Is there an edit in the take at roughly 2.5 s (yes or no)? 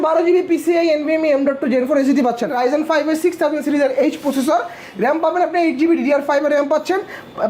yes